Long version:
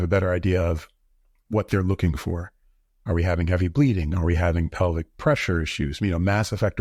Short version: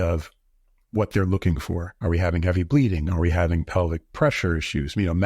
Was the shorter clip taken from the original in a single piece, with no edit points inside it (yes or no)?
no